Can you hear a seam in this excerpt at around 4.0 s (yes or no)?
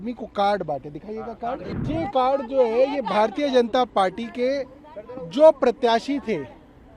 no